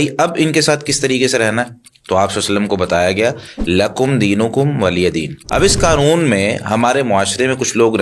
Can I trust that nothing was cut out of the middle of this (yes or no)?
no